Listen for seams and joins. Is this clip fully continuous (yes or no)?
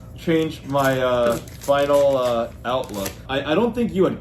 no